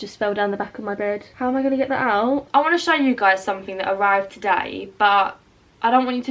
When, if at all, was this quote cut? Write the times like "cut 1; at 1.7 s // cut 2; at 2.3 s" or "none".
cut 1; at 2.5 s